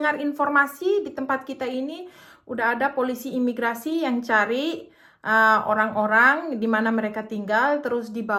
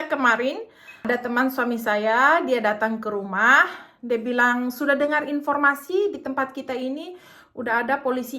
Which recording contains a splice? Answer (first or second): second